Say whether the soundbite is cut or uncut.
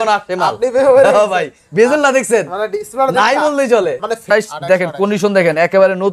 cut